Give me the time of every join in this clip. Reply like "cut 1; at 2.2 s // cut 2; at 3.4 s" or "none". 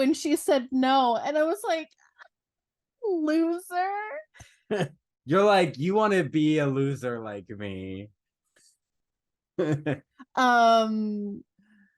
cut 1; at 4.9 s